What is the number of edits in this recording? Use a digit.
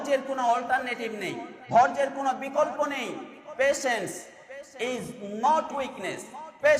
1